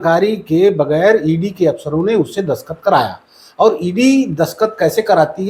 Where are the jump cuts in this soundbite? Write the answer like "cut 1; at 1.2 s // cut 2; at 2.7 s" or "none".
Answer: none